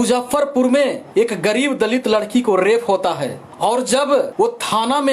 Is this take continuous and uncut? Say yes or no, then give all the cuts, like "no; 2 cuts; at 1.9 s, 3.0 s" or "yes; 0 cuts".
no; 3 cuts; at 1.0 s, 3.4 s, 4.3 s